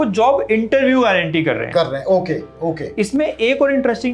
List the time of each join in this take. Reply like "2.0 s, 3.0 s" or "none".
none